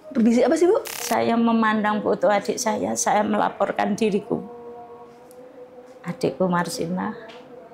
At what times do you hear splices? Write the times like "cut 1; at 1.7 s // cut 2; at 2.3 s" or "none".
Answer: cut 1; at 1.0 s